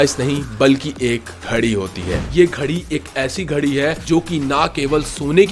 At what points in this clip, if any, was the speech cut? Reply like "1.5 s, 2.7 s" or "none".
1.3 s, 2.2 s, 4.0 s